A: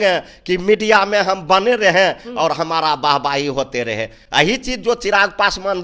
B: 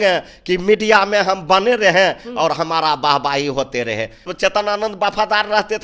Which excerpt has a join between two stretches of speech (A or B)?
B